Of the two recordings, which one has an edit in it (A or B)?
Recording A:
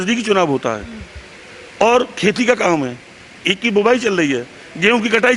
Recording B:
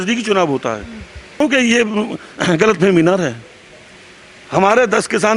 B